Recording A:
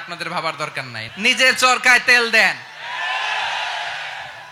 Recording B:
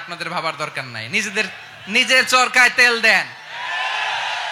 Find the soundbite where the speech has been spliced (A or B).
A